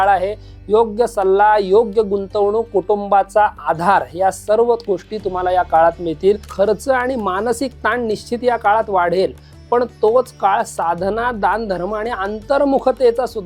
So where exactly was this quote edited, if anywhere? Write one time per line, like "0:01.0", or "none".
0:06.5